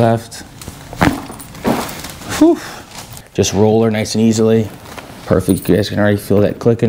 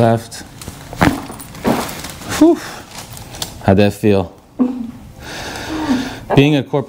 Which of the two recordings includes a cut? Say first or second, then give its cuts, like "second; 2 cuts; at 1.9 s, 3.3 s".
first; 1 cut; at 3.1 s